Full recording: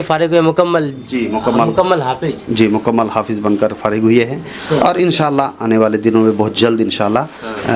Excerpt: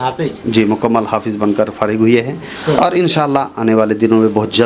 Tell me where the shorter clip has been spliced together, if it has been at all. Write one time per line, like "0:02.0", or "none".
none